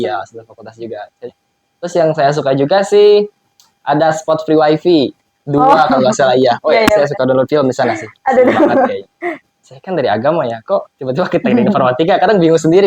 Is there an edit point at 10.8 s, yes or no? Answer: no